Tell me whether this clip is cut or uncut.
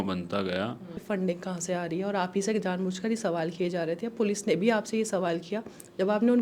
cut